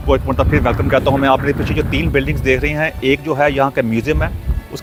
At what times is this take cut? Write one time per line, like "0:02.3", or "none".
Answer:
none